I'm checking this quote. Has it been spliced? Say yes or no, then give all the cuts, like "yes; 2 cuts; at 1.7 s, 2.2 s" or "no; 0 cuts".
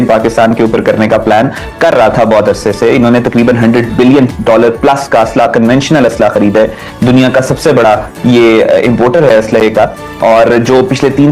no; 0 cuts